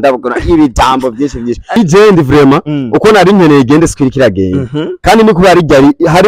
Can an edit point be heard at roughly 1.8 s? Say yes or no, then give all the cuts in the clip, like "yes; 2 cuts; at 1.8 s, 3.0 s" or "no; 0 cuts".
yes; 1 cut; at 1.8 s